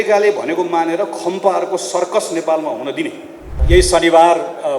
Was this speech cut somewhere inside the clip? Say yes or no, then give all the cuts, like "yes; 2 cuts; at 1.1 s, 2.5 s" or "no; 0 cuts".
yes; 1 cut; at 3.6 s